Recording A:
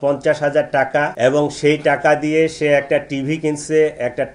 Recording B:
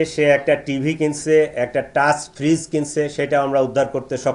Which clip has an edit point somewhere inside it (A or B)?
A